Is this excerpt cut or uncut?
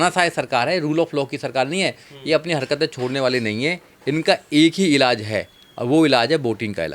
cut